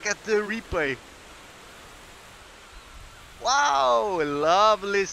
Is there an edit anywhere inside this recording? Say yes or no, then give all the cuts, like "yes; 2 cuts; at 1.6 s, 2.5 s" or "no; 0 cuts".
no; 0 cuts